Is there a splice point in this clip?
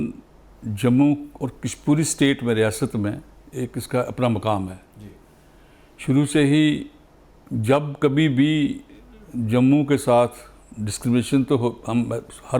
no; 0 cuts

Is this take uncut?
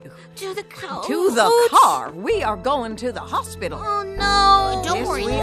yes; 0 cuts

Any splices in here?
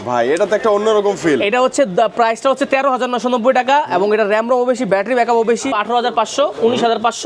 yes; 1 cut; at 5.7 s

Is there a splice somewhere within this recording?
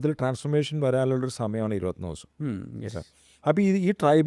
no; 0 cuts

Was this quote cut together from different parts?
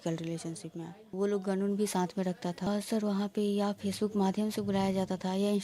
yes; 2 cuts; at 1.1 s, 2.7 s

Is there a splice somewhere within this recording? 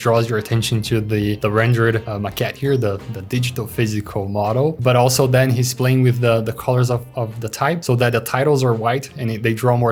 no; 0 cuts

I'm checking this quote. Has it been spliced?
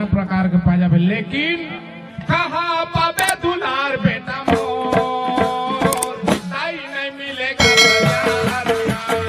no; 0 cuts

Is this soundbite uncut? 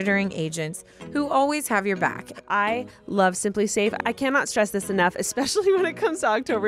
no; 1 cut; at 2.2 s

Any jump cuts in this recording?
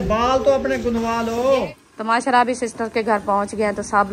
yes; 1 cut; at 1.8 s

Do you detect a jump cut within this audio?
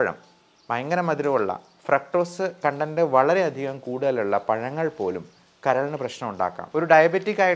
yes; 1 cut; at 6.6 s

